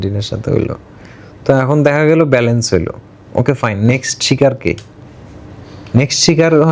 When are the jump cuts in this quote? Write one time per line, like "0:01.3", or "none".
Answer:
none